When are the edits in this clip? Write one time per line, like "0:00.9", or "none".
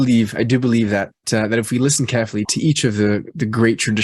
0:01.2
0:02.5